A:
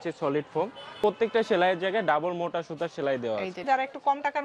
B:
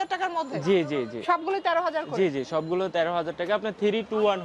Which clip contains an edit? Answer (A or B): A